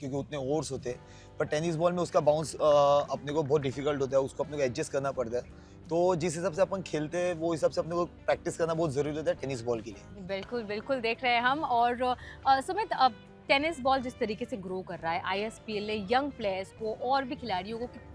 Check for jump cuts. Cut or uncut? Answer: uncut